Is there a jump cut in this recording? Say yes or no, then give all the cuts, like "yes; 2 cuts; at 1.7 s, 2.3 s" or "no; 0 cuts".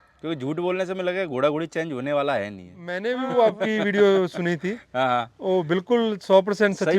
yes; 1 cut; at 3.0 s